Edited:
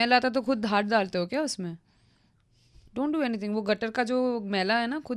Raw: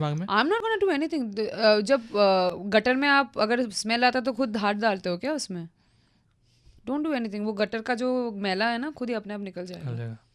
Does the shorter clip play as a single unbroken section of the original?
yes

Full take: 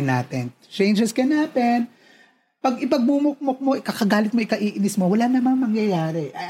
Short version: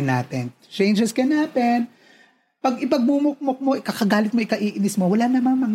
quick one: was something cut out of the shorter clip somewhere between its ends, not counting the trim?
no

